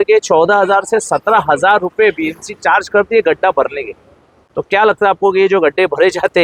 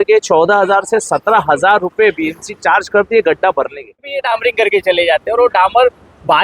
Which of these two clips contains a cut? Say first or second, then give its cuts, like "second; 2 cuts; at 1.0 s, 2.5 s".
second; 1 cut; at 4.2 s